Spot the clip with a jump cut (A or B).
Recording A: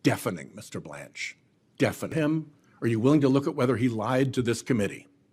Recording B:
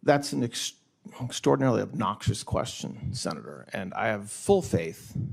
A